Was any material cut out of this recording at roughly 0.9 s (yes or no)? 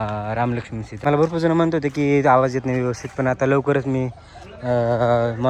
yes